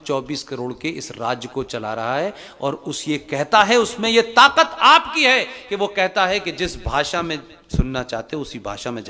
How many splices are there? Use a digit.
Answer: 0